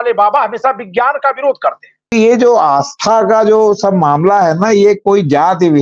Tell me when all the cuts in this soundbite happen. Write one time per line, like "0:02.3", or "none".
0:02.1